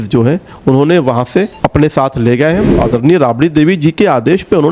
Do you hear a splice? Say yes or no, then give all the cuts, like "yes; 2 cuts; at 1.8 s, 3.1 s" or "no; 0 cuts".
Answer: yes; 2 cuts; at 1.5 s, 2.7 s